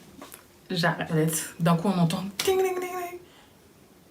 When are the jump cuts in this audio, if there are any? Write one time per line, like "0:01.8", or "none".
0:01.1